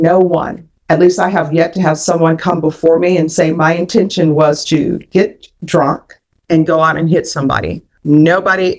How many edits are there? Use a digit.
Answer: 0